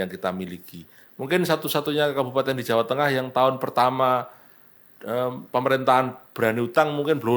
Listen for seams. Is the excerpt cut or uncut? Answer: uncut